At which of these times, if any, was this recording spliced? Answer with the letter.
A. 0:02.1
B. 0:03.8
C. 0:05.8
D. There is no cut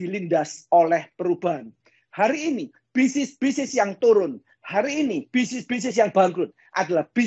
D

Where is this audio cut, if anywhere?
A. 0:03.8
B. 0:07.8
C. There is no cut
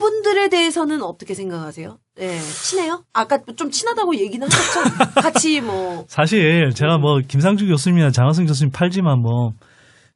B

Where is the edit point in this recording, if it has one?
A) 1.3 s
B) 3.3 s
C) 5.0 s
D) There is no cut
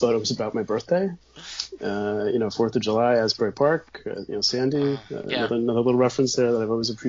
A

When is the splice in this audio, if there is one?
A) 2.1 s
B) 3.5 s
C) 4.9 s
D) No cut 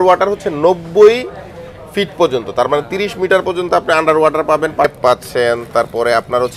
C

